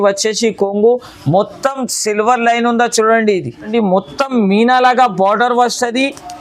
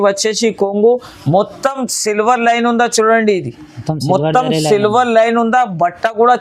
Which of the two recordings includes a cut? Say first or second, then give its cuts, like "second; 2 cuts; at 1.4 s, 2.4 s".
first; 1 cut; at 3.7 s